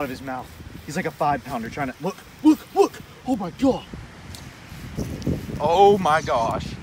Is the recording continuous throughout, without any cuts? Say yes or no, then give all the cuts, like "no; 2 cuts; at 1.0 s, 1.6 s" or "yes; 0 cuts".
no; 1 cut; at 4.0 s